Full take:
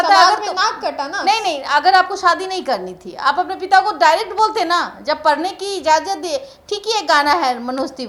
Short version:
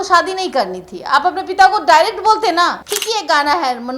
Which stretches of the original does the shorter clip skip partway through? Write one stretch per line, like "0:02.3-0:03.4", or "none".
0:04.9-0:06.6